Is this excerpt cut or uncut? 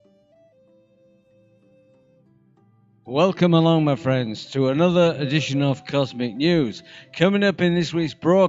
cut